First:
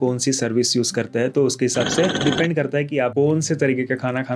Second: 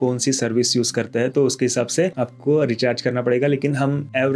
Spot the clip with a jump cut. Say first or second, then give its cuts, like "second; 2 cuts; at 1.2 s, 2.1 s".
first; 1 cut; at 2.2 s